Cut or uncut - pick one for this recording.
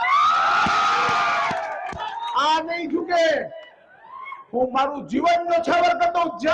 uncut